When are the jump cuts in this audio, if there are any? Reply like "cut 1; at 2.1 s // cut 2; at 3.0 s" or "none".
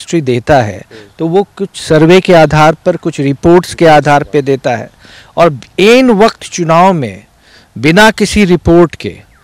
none

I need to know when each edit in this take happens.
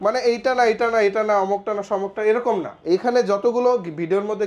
none

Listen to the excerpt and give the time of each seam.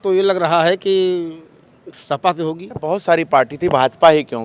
cut 1; at 2.9 s

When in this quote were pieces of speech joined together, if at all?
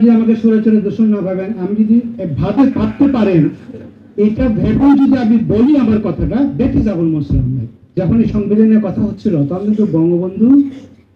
cut 1; at 8.0 s

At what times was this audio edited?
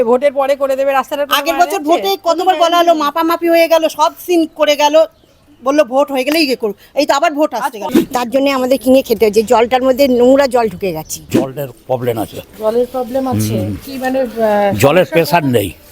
cut 1; at 7.9 s // cut 2; at 11.6 s

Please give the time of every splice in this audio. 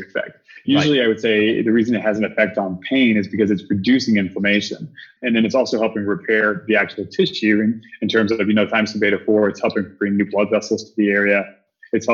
cut 1; at 5.1 s

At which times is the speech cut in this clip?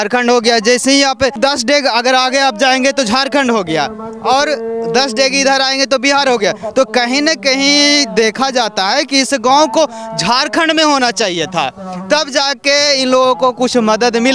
cut 1; at 1.4 s

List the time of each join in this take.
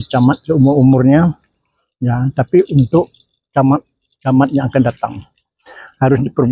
none

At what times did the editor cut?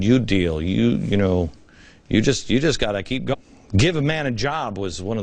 none

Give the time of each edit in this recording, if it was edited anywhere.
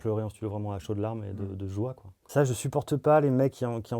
cut 1; at 2.1 s

